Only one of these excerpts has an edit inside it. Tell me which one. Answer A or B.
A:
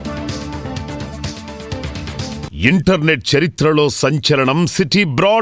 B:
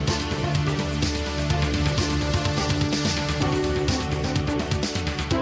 A